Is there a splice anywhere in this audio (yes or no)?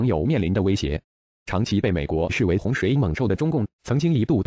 no